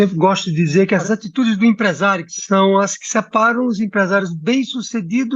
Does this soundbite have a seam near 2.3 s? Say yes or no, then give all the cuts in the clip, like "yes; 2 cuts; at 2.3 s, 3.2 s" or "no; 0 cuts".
yes; 2 cuts; at 1.0 s, 2.3 s